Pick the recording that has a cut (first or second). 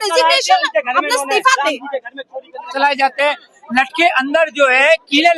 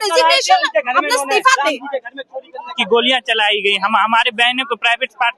first